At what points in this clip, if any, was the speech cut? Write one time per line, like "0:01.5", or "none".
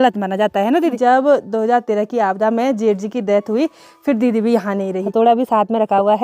0:01.0
0:05.0